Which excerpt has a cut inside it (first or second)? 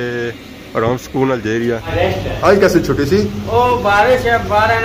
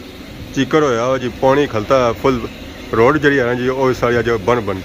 first